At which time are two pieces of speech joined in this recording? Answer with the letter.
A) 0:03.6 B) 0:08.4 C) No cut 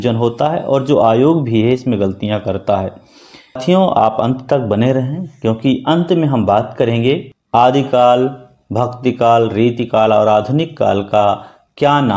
A